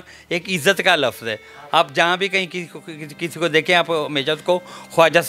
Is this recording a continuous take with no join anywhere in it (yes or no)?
yes